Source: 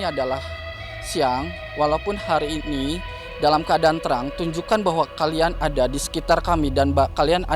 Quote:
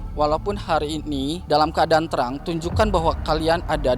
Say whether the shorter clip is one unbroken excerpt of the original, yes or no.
no